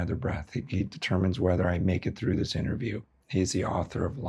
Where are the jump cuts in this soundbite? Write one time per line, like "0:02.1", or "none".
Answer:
0:03.1

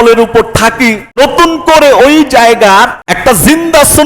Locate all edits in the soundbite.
0:01.1
0:03.0

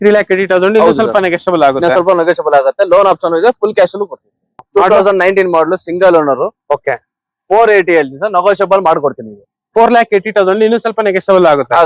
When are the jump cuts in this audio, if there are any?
0:04.6

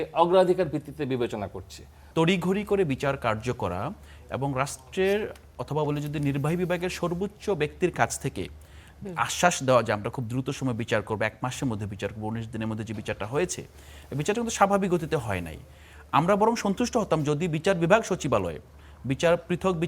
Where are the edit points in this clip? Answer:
0:01.9

